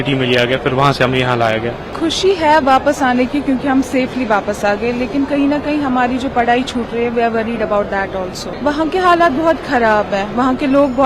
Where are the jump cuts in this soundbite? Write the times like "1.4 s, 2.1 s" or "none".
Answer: none